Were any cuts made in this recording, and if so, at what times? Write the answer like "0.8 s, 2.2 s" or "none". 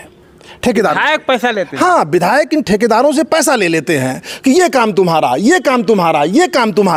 none